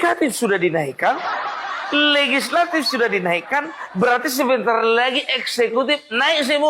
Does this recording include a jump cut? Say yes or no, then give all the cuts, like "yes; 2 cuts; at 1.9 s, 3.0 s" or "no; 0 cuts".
no; 0 cuts